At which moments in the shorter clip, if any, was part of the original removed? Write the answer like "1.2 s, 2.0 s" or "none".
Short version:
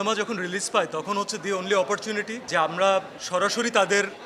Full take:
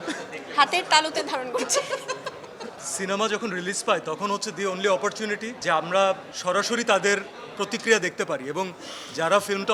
none